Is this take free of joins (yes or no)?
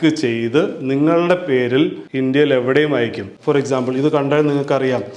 no